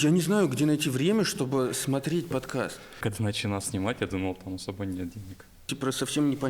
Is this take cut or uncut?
cut